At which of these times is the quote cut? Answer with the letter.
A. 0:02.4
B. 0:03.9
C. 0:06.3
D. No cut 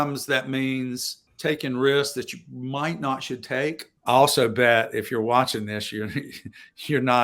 B